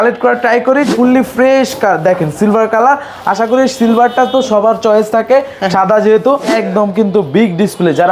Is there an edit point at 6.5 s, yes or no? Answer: yes